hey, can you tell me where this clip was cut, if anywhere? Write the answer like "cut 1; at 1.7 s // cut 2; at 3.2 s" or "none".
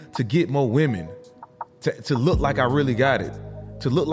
none

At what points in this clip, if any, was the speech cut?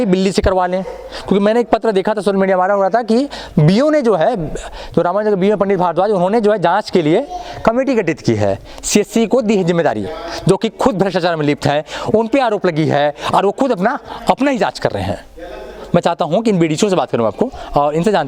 none

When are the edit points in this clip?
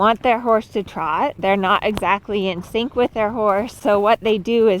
cut 1; at 1.4 s // cut 2; at 3.8 s

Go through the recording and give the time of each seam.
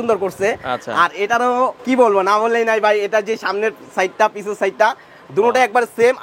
cut 1; at 1.8 s

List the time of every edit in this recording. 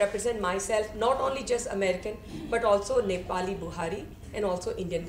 none

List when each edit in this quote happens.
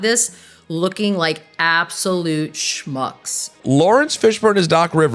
cut 1; at 3.6 s

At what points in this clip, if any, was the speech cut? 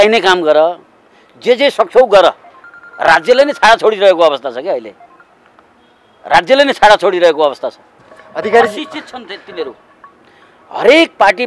none

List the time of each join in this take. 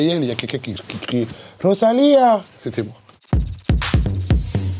cut 1; at 3.1 s

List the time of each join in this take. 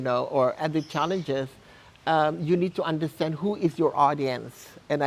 none

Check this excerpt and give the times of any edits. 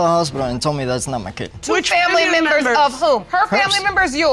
cut 1; at 1.5 s // cut 2; at 3.3 s

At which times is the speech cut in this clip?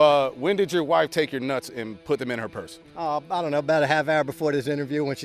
cut 1; at 2.0 s

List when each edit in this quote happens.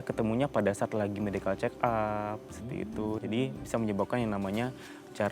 cut 1; at 3.2 s

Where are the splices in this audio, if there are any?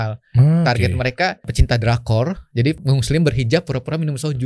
cut 1; at 1.5 s // cut 2; at 2.8 s

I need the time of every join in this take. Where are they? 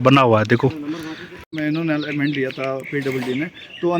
cut 1; at 1.4 s

